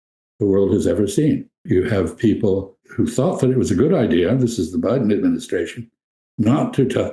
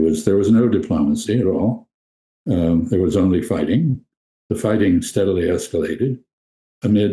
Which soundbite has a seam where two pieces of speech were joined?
first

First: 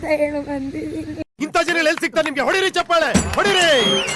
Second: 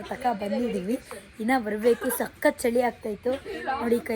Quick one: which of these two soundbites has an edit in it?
first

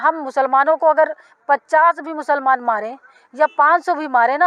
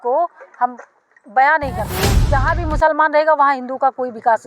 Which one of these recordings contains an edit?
second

